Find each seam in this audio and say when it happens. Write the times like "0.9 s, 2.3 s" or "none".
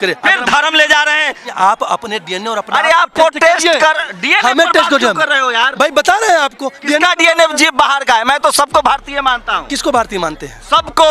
1.5 s